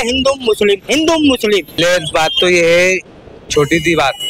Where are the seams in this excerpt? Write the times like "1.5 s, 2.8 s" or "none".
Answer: 1.8 s